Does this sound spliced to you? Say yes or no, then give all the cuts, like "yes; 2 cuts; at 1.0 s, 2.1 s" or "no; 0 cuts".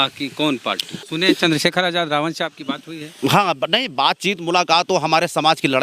yes; 1 cut; at 1.1 s